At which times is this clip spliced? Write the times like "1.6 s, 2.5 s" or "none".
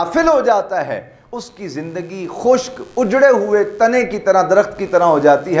none